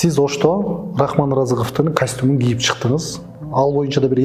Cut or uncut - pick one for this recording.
uncut